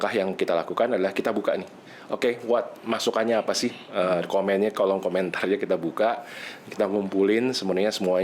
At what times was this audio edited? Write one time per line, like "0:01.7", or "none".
none